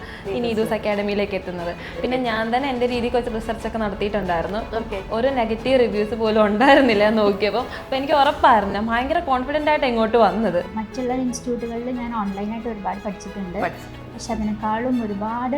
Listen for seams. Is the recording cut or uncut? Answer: cut